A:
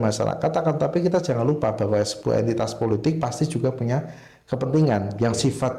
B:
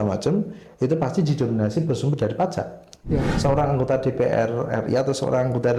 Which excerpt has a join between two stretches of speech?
B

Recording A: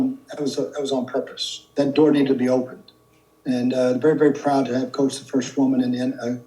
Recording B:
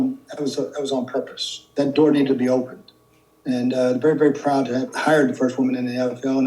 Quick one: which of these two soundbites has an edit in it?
B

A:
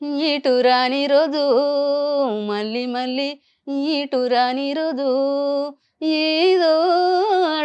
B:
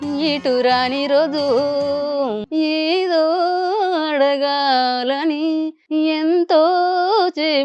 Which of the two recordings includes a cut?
B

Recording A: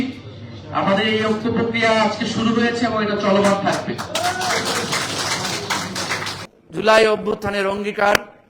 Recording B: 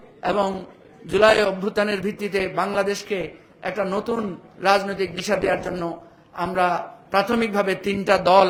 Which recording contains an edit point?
A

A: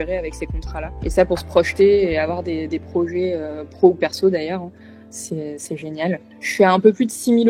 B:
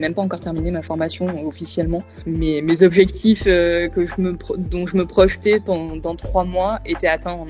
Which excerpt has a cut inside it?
A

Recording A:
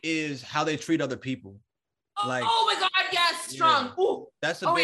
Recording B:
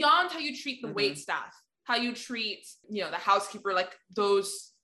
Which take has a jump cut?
B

